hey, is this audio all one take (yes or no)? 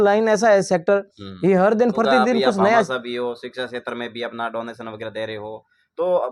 no